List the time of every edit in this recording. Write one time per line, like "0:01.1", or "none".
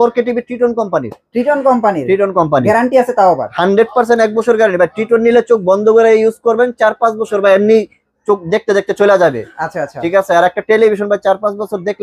none